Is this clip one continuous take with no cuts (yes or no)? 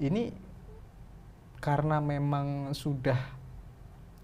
yes